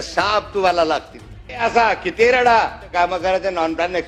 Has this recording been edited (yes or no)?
yes